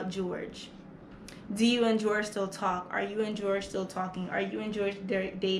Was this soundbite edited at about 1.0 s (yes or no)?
no